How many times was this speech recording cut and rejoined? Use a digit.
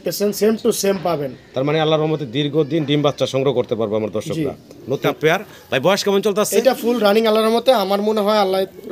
1